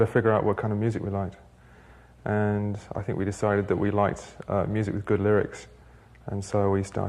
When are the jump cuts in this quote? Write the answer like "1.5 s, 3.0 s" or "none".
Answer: 1.6 s

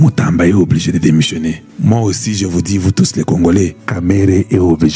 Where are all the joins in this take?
1.7 s, 3.8 s

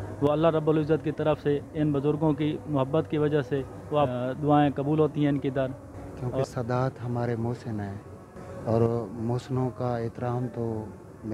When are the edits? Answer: 4.1 s, 6.3 s

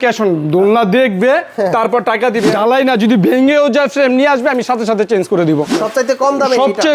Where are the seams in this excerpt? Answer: 2.5 s, 5.7 s

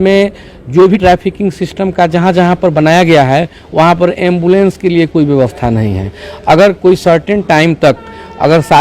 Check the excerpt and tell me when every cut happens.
1.0 s

